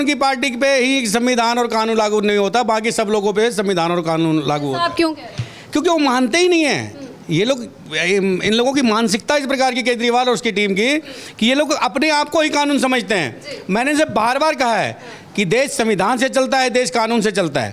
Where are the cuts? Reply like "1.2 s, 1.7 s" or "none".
none